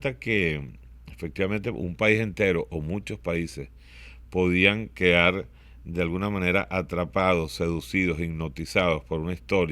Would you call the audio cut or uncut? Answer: uncut